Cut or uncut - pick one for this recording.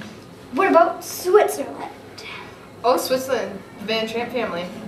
uncut